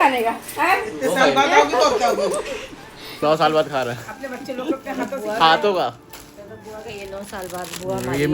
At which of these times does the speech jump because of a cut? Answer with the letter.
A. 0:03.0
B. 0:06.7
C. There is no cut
A